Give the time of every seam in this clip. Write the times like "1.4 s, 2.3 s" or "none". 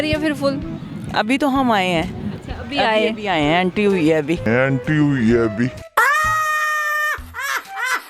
none